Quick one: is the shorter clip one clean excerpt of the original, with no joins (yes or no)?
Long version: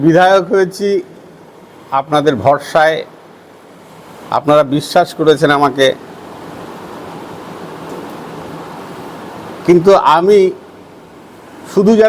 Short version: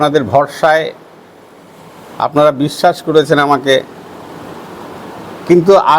no